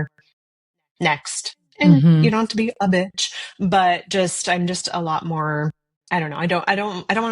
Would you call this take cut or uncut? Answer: cut